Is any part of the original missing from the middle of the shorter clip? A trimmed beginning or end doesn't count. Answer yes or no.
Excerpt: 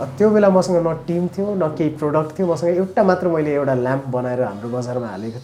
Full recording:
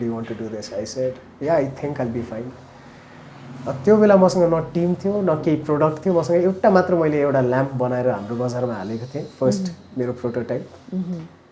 no